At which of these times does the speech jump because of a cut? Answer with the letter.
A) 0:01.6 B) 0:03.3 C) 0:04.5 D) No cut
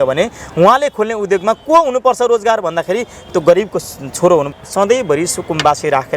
C